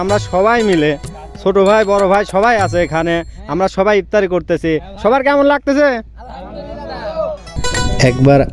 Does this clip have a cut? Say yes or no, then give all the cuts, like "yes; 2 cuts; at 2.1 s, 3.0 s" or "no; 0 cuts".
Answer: yes; 1 cut; at 7.6 s